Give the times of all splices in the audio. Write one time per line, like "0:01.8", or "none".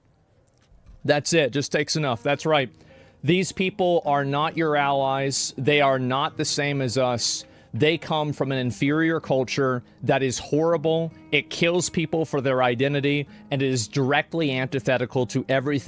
none

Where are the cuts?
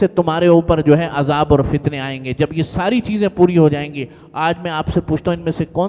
none

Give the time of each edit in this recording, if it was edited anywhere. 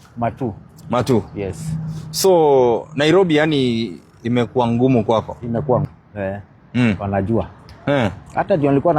0:05.9

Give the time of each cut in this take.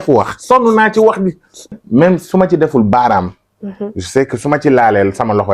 0:01.7

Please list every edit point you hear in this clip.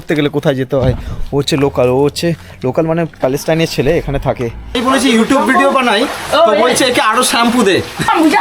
0:04.8

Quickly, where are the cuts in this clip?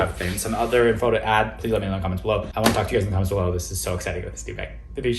0:02.5

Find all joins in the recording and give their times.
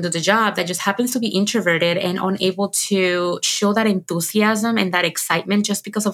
none

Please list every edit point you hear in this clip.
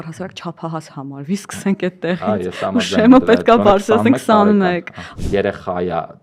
0:05.1

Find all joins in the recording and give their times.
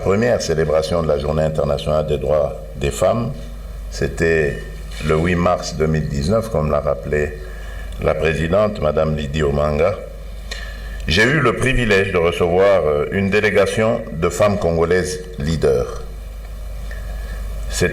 none

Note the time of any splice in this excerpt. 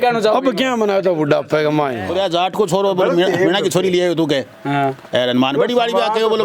0:02.1

